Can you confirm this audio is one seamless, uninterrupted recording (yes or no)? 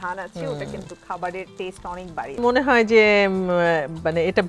no